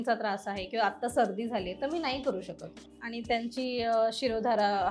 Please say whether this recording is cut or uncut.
cut